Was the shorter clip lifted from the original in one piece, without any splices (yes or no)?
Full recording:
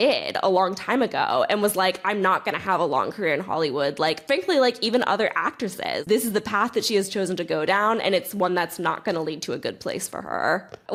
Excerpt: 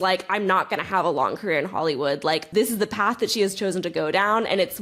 no